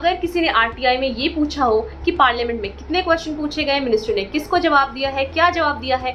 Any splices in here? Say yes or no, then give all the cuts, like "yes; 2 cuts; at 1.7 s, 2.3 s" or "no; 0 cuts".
no; 0 cuts